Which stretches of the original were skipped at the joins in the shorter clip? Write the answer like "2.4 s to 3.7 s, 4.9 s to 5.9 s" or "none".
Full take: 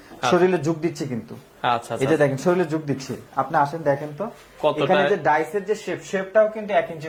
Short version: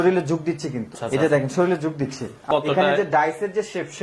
1.4 s to 1.9 s, 3.2 s to 4.4 s

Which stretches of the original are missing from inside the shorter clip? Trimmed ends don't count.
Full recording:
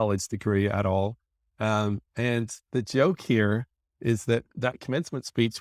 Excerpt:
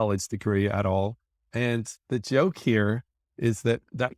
1.4 s to 2.1 s

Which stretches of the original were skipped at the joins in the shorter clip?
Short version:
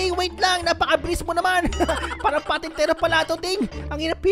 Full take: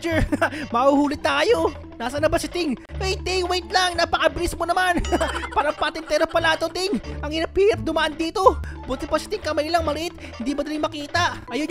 none

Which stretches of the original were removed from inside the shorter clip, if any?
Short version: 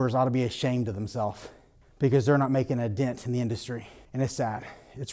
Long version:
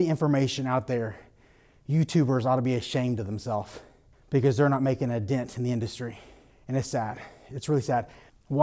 6.3 s to 6.5 s

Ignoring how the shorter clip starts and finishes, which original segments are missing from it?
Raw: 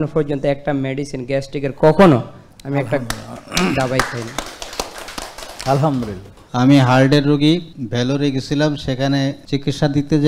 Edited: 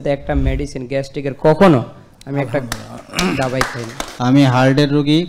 4.4 s to 6.3 s

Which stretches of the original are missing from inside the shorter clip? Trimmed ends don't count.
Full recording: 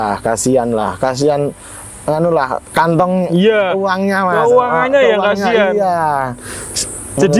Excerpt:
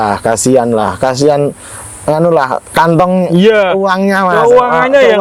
none

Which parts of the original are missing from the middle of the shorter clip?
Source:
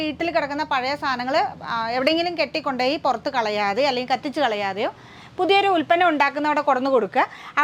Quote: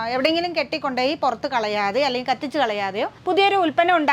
5.0 s to 5.3 s

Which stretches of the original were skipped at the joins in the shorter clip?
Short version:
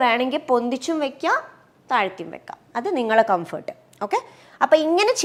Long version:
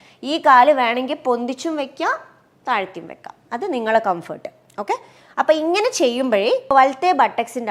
none

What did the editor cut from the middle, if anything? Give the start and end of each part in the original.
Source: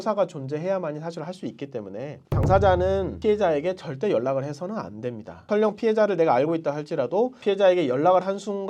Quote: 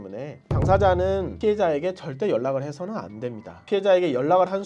5.4 s to 7.3 s

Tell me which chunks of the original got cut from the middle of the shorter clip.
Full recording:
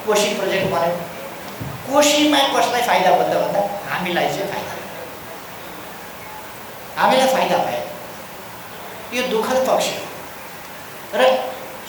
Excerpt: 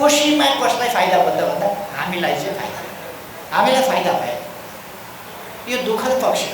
5.2 s to 6.8 s

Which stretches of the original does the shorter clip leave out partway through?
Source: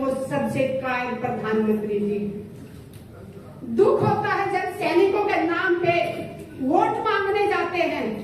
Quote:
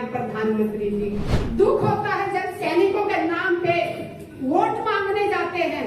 2.4 s to 3.5 s

